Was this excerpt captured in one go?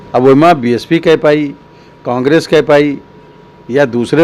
yes; 0 cuts

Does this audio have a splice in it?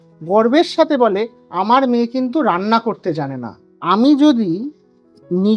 yes; 1 cut; at 3.8 s

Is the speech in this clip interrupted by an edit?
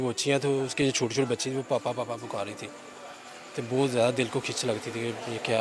no; 0 cuts

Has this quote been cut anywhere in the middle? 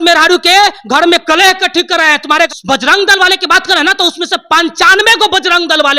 yes; 1 cut; at 2.5 s

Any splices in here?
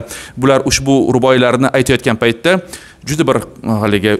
no; 0 cuts

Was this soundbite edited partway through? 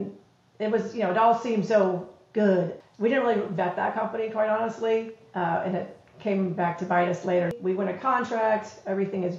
yes; 2 cuts; at 2.7 s, 7.5 s

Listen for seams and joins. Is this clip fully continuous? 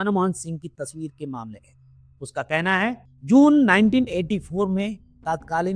no; 1 cut; at 3.1 s

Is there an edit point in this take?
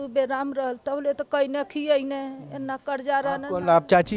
no; 0 cuts

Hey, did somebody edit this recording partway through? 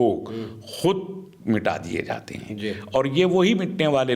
no; 0 cuts

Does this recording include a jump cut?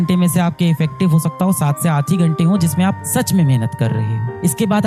no; 0 cuts

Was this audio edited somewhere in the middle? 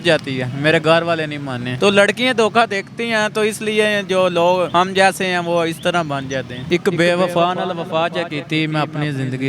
yes; 3 cuts; at 1.6 s, 4.7 s, 6.6 s

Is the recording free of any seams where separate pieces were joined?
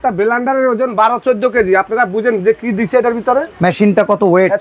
yes; 0 cuts

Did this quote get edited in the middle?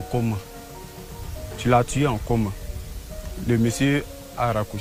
no; 0 cuts

